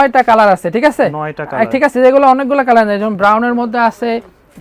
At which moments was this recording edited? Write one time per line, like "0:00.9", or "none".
none